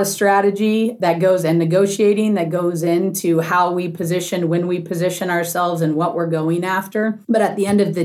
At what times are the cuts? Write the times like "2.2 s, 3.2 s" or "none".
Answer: 1.0 s